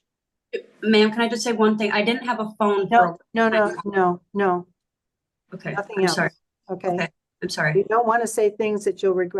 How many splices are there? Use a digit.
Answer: 0